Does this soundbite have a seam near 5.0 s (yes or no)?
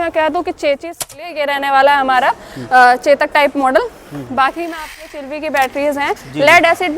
yes